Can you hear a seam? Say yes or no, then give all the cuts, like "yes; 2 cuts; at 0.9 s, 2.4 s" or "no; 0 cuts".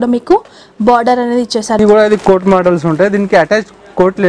yes; 1 cut; at 1.8 s